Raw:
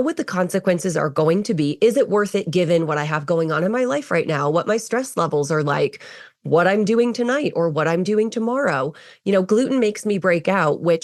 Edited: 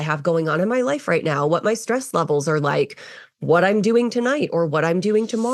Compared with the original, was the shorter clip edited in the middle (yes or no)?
no